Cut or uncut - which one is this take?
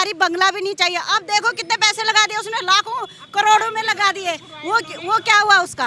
uncut